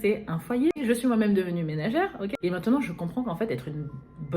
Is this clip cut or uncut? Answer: cut